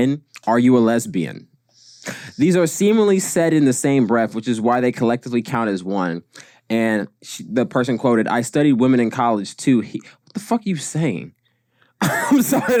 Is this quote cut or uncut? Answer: uncut